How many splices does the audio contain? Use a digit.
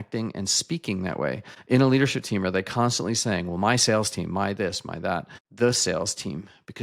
2